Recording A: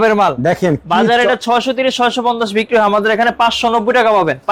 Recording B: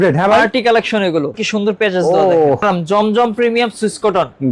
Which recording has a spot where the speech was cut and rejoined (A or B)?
B